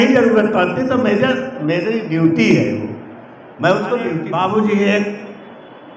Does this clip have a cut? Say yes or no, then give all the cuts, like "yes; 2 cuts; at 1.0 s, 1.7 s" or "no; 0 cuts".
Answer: yes; 1 cut; at 4.2 s